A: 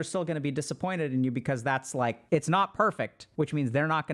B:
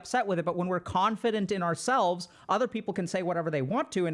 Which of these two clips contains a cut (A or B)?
A